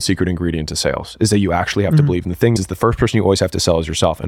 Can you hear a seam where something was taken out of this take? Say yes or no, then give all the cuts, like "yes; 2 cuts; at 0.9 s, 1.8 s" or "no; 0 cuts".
yes; 1 cut; at 2.5 s